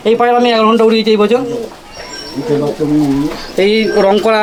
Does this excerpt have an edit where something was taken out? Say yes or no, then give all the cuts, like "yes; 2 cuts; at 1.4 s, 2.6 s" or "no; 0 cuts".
no; 0 cuts